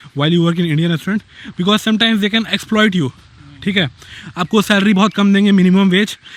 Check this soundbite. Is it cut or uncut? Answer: uncut